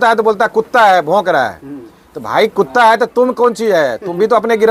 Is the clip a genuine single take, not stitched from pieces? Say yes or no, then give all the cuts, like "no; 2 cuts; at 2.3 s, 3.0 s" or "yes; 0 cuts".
yes; 0 cuts